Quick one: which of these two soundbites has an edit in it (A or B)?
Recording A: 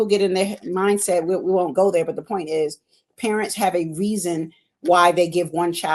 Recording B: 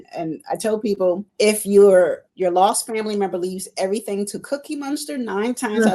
B